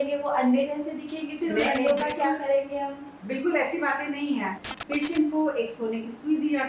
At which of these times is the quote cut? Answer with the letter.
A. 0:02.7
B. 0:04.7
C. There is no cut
B